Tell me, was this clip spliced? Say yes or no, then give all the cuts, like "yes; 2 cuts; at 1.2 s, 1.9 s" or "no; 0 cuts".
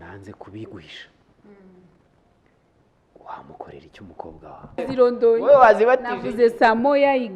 yes; 1 cut; at 4.8 s